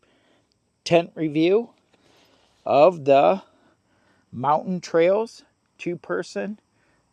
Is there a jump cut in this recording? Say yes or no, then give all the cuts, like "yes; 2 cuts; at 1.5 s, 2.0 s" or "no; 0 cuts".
no; 0 cuts